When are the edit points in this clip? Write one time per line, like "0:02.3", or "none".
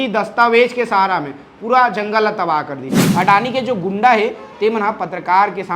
0:03.0